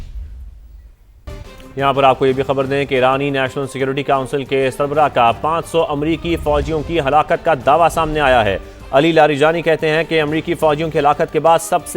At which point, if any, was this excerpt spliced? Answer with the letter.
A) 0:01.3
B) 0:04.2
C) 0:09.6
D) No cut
A